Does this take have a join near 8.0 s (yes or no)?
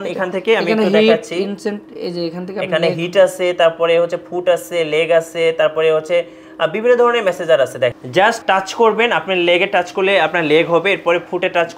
yes